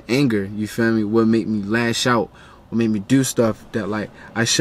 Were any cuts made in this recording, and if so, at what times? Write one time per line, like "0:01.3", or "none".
none